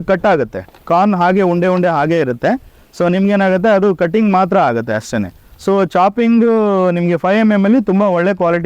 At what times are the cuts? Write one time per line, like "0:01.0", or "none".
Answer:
none